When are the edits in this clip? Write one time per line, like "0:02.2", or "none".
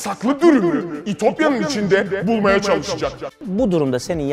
0:03.4